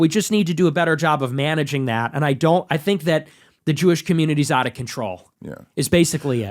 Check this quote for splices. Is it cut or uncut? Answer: uncut